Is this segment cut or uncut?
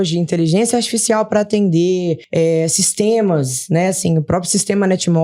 cut